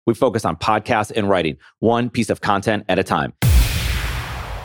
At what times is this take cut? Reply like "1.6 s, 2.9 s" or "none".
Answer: 3.4 s